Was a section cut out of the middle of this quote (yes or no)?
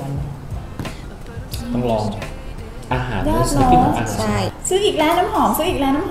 yes